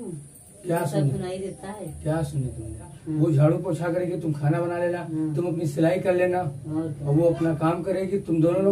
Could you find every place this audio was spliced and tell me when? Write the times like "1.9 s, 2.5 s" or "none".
3.0 s